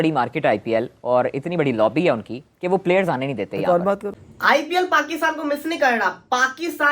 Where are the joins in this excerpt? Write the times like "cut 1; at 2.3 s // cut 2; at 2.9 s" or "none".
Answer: cut 1; at 4.2 s

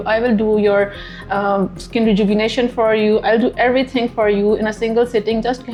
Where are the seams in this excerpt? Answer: none

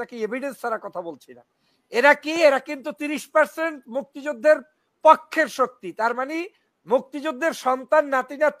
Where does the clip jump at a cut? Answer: none

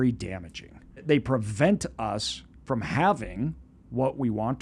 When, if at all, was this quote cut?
cut 1; at 1.0 s

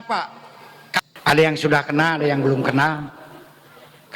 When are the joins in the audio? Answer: cut 1; at 1.0 s

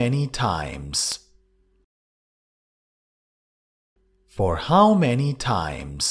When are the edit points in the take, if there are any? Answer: cut 1; at 1.4 s

